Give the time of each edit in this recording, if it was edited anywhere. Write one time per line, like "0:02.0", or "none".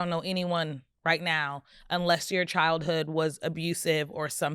none